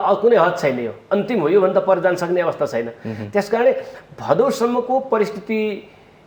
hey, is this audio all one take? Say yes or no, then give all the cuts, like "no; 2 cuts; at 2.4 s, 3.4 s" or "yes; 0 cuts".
yes; 0 cuts